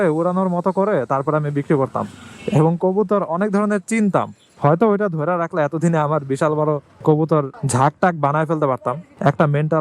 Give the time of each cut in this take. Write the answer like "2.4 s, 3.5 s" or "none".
none